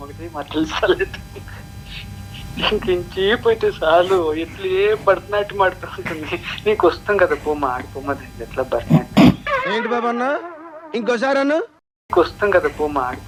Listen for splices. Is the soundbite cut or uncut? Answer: uncut